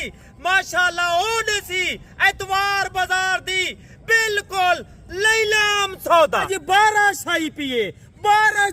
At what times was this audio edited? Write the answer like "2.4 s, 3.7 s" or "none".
6.5 s